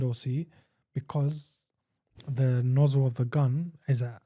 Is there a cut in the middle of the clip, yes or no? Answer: no